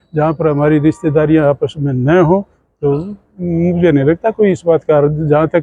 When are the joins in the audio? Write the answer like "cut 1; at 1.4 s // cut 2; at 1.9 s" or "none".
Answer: none